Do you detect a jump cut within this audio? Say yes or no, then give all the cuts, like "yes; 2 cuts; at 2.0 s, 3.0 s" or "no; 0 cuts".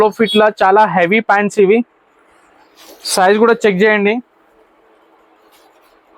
no; 0 cuts